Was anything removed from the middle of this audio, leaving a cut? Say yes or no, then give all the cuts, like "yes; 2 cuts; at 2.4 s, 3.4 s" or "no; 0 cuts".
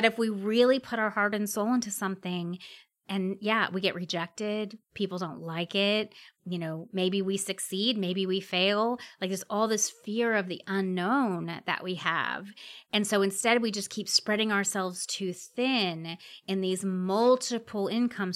no; 0 cuts